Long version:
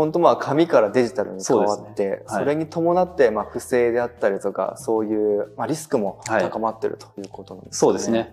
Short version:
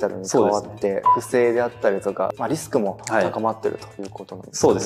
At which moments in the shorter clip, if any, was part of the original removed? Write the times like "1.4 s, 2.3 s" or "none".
1.1 s, 2.4 s